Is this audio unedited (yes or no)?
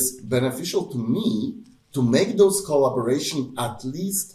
yes